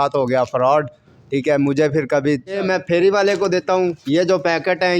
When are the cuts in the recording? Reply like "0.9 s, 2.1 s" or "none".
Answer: 2.6 s